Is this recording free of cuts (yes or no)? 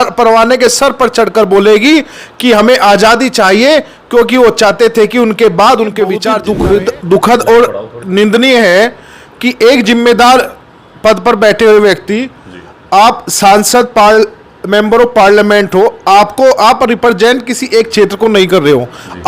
no